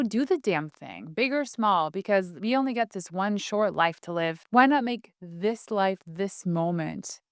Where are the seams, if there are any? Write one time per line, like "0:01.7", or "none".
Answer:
0:04.4